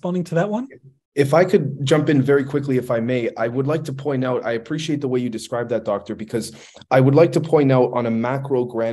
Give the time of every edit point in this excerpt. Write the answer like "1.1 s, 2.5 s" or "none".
none